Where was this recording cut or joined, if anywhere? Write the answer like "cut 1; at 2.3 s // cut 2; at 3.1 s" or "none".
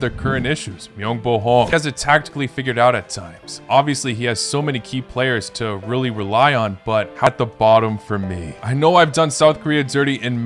cut 1; at 1.7 s // cut 2; at 7.3 s